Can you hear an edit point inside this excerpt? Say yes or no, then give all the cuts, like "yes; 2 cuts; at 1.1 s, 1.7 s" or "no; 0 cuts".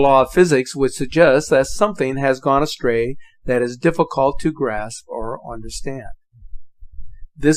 no; 0 cuts